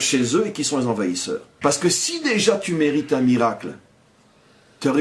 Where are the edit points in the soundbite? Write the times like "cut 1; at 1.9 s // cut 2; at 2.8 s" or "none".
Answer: cut 1; at 1.5 s